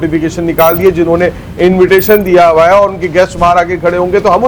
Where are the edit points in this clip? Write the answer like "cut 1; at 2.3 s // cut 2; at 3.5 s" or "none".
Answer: none